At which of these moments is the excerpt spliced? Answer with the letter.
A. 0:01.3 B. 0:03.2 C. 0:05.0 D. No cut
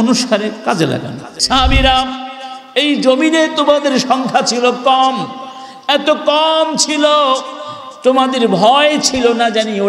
A